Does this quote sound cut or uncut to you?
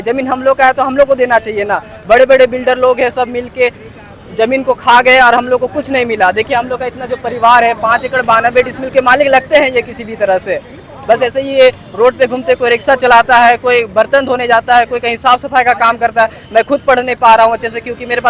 uncut